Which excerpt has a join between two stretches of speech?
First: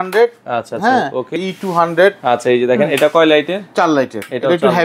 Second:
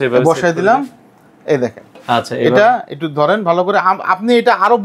first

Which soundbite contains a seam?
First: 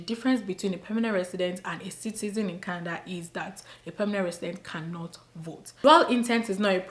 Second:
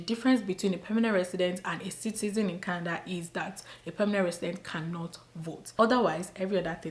first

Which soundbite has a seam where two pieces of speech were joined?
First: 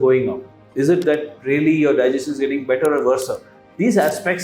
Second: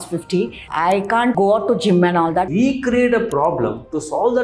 second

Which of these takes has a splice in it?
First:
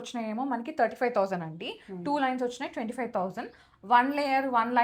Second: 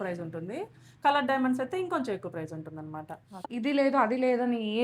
second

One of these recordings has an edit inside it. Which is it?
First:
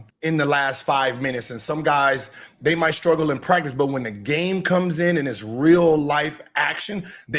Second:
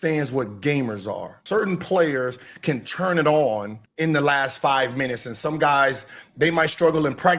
second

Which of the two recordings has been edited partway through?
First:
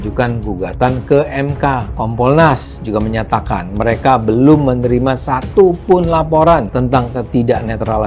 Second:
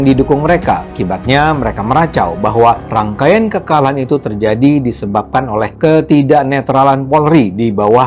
first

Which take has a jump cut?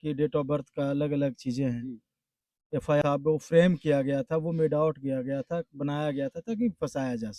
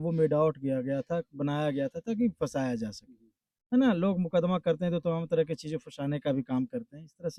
first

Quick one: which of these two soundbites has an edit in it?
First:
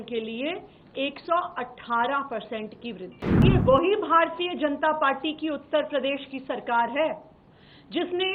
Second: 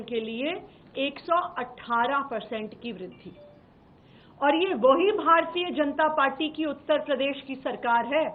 first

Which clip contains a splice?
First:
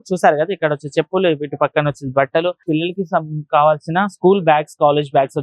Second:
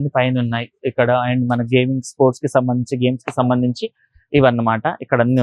first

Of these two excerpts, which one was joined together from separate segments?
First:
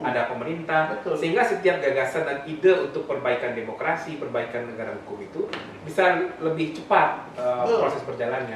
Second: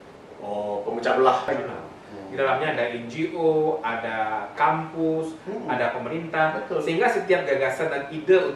second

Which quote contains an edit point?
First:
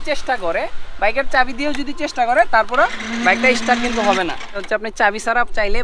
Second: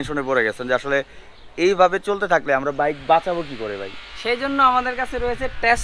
first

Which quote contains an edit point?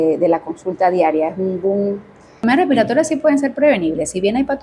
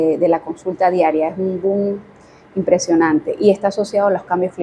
first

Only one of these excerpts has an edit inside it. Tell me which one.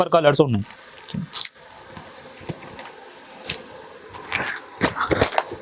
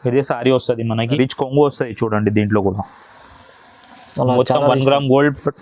second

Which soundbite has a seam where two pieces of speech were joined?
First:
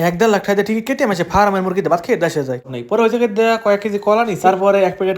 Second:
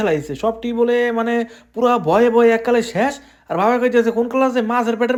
first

